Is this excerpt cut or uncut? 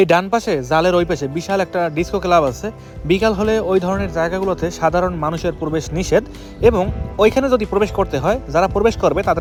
uncut